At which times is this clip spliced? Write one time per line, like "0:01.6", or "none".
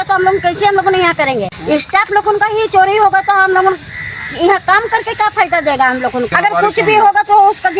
0:01.5
0:06.3